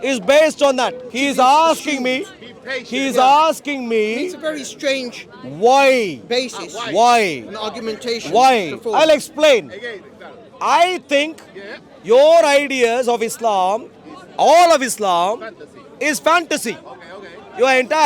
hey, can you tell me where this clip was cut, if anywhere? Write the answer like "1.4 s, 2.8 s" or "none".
1.1 s